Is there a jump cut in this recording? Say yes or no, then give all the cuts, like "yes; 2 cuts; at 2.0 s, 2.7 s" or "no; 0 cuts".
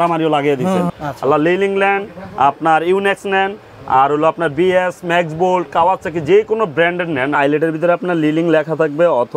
yes; 2 cuts; at 0.9 s, 7.4 s